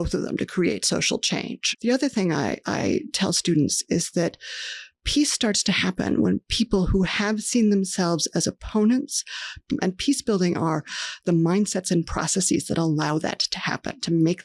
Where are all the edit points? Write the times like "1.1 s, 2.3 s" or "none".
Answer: 1.6 s